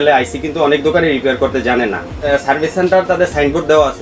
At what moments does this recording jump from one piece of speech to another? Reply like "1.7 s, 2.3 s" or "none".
2.2 s